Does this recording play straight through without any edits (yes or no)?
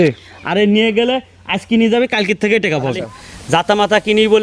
no